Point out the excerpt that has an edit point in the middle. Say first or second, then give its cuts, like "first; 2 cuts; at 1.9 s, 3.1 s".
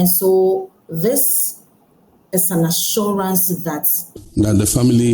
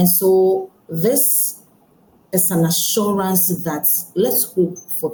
first; 1 cut; at 4.0 s